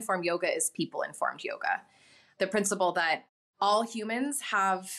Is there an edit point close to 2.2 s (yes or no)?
yes